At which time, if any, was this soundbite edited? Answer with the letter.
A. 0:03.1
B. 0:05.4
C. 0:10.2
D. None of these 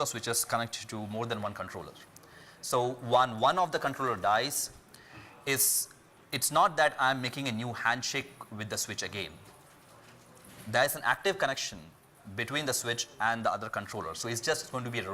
A